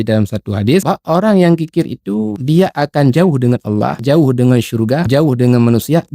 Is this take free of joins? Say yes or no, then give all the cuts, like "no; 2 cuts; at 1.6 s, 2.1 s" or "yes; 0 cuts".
no; 4 cuts; at 0.8 s, 2.4 s, 4.0 s, 5.0 s